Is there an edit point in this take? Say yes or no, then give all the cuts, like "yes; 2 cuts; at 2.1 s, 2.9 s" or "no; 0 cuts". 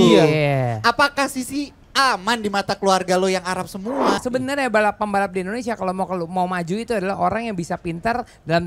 yes; 1 cut; at 4.1 s